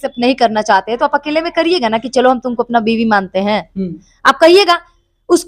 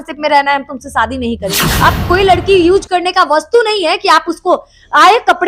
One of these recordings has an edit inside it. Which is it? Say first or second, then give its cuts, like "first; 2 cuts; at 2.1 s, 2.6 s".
second; 1 cut; at 1.5 s